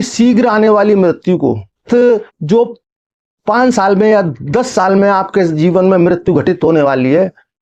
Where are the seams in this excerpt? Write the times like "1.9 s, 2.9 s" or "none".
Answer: none